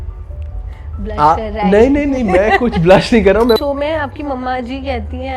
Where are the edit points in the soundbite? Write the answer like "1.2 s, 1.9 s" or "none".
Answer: 3.6 s